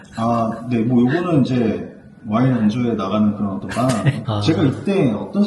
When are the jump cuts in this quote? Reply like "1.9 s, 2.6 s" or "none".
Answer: 4.2 s